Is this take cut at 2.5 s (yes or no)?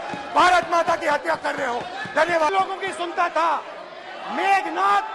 yes